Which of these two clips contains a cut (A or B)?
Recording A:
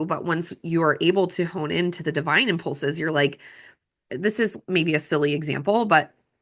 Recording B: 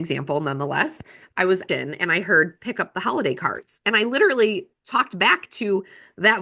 B